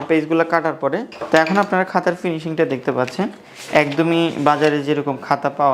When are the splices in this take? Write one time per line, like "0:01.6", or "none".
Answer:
0:01.1

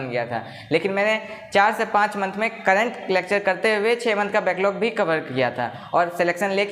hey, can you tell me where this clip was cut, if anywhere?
none

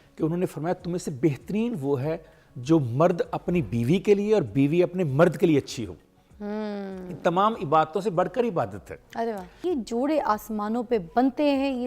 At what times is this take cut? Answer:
0:09.5

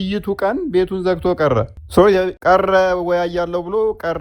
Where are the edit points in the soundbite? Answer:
0:01.8
0:02.4

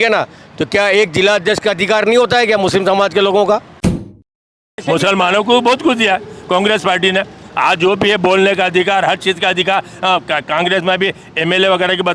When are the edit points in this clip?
0:04.2

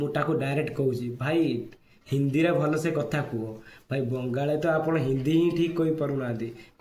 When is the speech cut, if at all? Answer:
none

